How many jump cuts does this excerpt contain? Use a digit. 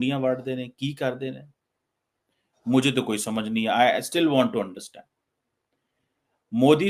0